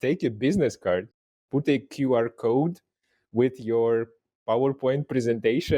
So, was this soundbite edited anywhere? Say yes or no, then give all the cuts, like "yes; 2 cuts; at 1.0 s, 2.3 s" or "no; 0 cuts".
no; 0 cuts